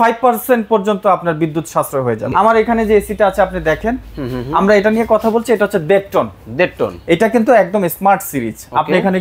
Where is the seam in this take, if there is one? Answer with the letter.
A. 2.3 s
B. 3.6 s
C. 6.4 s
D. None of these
A